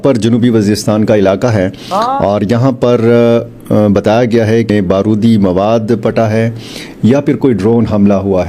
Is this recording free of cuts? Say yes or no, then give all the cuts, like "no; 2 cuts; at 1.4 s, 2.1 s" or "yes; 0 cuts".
no; 1 cut; at 4.7 s